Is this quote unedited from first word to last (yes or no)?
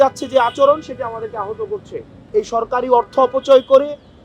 no